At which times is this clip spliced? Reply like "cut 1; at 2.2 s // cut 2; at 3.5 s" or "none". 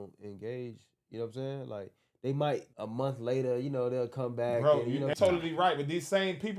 cut 1; at 2.8 s // cut 2; at 5.1 s